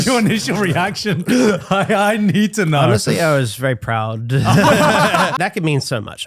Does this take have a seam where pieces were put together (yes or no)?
yes